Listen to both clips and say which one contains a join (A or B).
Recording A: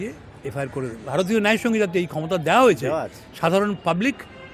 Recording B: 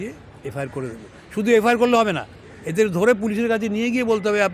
A